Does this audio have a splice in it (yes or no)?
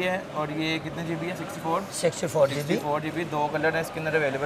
no